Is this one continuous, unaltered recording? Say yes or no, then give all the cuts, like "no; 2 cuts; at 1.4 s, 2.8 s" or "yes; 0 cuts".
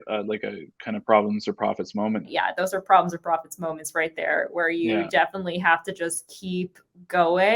no; 1 cut; at 2.3 s